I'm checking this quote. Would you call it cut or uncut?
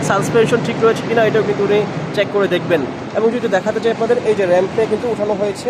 uncut